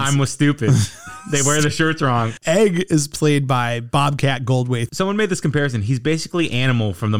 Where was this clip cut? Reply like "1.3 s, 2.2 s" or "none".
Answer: 2.3 s, 4.9 s